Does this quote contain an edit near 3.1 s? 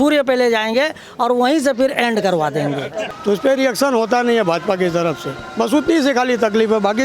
yes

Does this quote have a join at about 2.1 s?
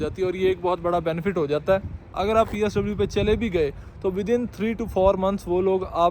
yes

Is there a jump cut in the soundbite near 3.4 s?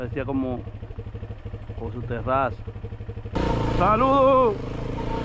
yes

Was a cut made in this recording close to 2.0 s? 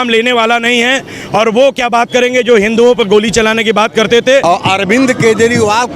no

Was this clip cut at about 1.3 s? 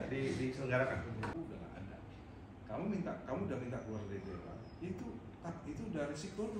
yes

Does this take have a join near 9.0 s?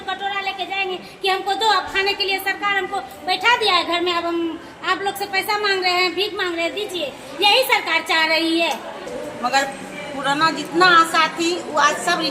yes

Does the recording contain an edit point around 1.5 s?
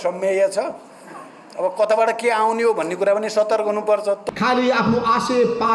no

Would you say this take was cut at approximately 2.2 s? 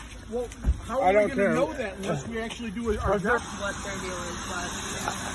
no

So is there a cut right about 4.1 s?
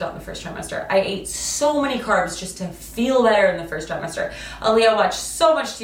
no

